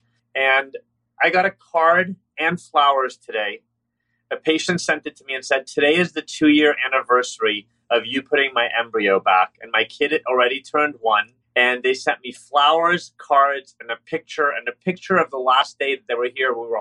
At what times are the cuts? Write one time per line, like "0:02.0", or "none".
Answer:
0:11.4